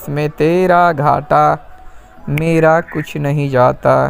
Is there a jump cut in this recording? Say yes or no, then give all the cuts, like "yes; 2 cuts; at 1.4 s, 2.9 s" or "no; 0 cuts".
no; 0 cuts